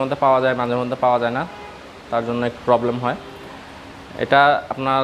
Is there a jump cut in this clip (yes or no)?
no